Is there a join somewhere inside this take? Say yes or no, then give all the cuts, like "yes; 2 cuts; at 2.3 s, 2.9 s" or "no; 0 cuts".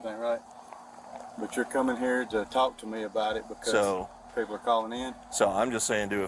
no; 0 cuts